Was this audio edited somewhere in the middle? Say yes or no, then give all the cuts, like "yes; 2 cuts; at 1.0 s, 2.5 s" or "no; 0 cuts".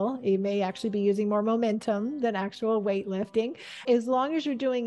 yes; 1 cut; at 3.8 s